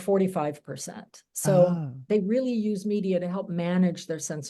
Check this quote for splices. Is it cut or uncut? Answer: cut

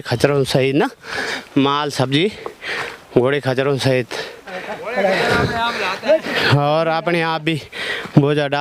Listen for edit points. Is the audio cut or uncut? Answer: uncut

